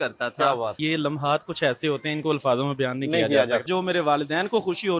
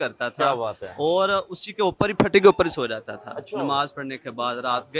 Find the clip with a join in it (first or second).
first